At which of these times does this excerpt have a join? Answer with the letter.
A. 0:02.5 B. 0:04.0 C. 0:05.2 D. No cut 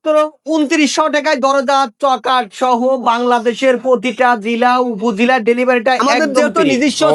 D